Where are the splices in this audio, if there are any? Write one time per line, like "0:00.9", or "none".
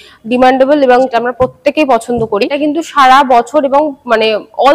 0:01.1
0:02.5